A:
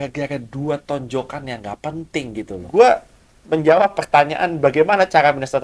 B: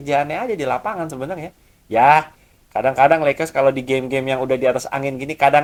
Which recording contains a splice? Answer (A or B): A